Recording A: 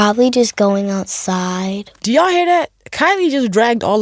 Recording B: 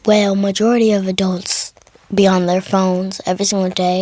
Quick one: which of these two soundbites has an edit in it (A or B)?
A